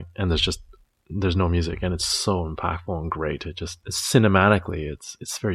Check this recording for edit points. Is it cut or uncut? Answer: cut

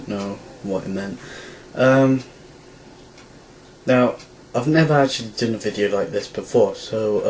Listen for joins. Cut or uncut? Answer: uncut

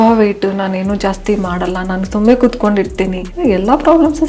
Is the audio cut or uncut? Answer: cut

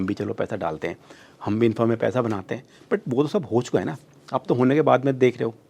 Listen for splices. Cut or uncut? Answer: uncut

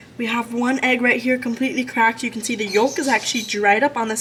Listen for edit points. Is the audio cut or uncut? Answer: uncut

